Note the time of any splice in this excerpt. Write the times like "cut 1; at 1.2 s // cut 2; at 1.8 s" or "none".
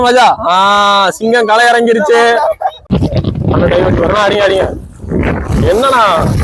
cut 1; at 2.8 s